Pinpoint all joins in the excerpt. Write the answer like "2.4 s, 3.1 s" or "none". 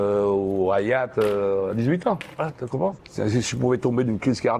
3.1 s